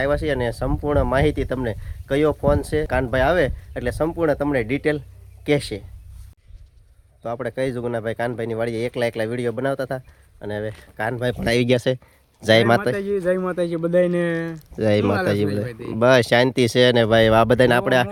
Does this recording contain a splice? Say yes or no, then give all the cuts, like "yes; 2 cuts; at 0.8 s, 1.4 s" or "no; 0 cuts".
no; 0 cuts